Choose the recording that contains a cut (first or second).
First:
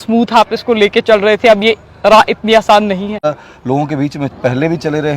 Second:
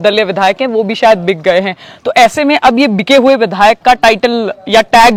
first